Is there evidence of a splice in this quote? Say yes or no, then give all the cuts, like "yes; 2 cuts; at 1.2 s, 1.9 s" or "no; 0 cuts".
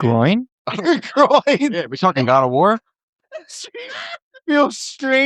no; 0 cuts